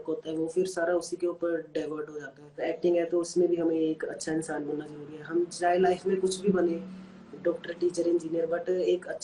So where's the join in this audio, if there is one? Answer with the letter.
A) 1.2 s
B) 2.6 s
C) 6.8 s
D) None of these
B